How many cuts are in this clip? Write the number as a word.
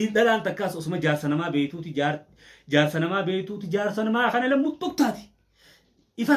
zero